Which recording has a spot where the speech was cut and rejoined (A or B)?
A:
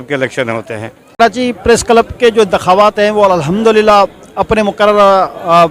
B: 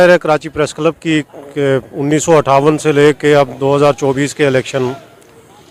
A